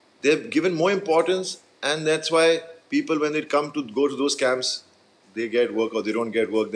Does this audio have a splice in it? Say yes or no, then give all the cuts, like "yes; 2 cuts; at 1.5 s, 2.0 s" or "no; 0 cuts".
no; 0 cuts